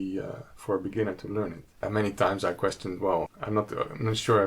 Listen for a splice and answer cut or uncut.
cut